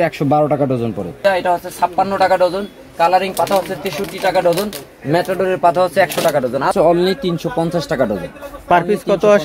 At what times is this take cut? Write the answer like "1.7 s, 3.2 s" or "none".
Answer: 1.2 s, 6.7 s